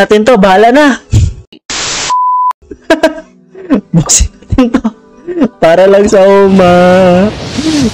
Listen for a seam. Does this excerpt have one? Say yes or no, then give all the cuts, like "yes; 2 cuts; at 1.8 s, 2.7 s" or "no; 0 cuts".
no; 0 cuts